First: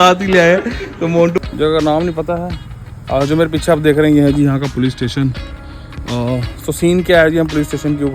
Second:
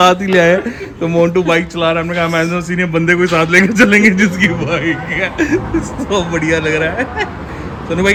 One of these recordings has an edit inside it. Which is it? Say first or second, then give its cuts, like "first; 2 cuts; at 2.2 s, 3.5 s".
first; 1 cut; at 1.4 s